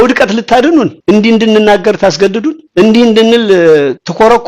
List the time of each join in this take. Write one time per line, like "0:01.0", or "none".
0:00.9